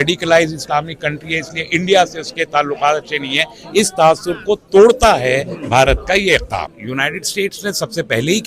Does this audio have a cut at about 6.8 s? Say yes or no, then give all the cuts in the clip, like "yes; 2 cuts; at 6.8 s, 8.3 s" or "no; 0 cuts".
yes; 1 cut; at 6.8 s